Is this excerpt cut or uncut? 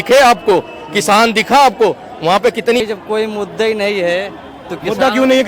cut